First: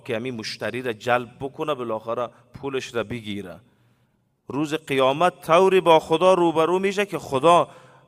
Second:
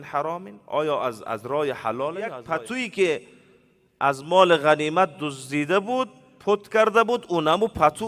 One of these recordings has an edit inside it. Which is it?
second; 1 cut; at 2.4 s

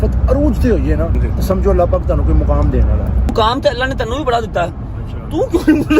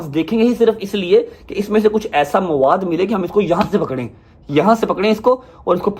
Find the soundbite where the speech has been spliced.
first; 2 cuts; at 1.2 s, 3.3 s

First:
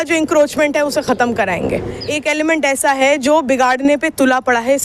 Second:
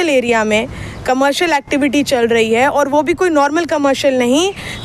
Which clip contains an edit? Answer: first; 1 cut; at 1.9 s

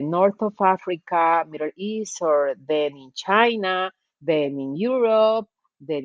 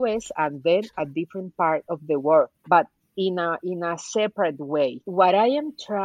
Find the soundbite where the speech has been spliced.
second; 2 cuts; at 2.6 s, 5.0 s

